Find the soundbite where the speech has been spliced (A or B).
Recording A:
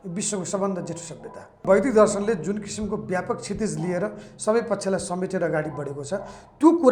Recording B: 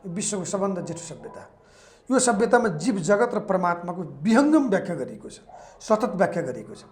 A